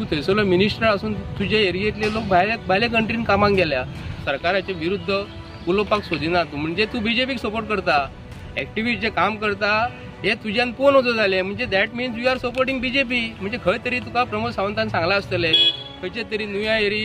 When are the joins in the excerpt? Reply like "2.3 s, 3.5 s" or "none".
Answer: 4.1 s